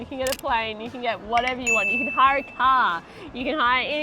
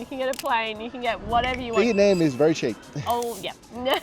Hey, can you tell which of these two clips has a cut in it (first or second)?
second